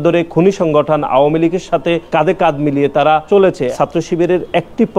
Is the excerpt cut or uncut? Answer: cut